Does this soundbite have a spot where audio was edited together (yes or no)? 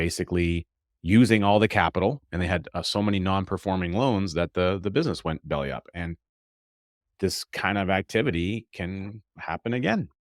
no